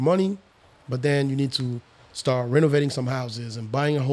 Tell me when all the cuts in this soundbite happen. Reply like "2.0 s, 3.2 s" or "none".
none